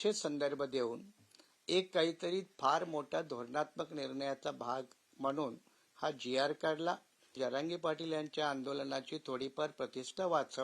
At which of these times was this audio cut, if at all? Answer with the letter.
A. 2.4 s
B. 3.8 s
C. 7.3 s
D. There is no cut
C